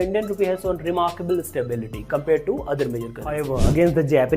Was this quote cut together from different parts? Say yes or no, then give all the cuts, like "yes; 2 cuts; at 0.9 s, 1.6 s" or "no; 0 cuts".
yes; 1 cut; at 3.4 s